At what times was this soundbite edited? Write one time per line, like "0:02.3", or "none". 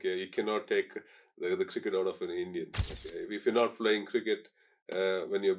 none

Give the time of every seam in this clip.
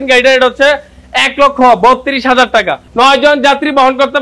0:02.8

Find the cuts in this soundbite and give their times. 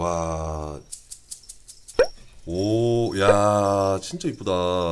0:01.8

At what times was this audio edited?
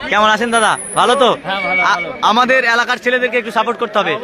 none

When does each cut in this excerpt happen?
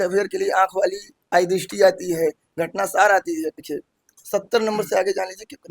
0:03.6

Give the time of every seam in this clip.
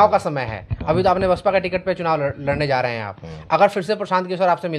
none

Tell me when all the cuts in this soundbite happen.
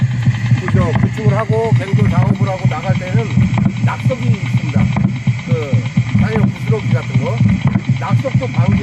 0:05.8

